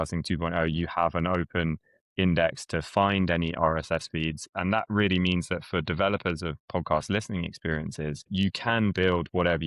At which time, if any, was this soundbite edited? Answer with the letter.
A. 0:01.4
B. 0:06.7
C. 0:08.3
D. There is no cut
C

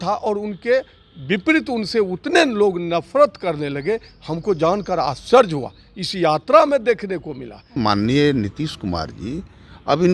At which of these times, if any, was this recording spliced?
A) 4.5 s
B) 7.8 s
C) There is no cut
B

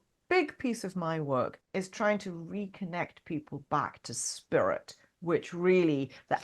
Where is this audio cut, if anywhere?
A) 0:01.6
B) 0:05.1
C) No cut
A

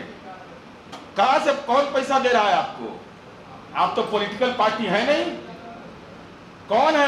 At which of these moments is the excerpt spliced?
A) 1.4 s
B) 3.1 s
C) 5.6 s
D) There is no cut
D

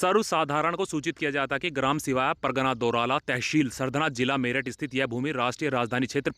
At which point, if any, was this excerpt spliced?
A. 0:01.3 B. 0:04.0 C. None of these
C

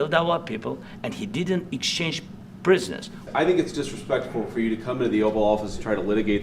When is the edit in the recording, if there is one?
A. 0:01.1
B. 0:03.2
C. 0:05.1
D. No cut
B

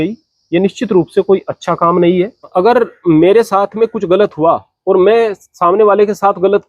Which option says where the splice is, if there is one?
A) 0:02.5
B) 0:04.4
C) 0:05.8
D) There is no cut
A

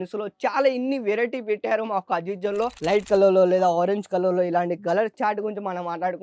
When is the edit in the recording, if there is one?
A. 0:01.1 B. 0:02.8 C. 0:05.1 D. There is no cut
B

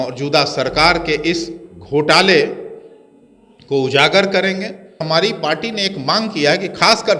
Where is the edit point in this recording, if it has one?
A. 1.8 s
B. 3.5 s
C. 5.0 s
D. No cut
C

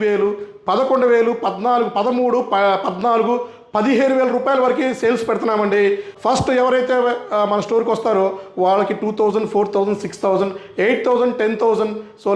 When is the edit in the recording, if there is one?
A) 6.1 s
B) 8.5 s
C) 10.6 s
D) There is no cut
A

